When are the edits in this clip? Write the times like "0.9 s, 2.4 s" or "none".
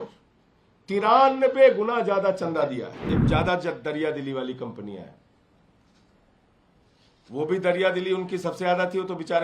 3.1 s